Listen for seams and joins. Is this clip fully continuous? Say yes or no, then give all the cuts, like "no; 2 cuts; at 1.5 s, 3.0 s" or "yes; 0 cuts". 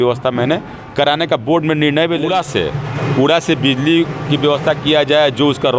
no; 1 cut; at 2.3 s